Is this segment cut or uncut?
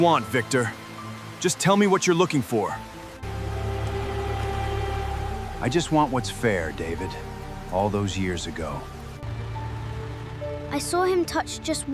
uncut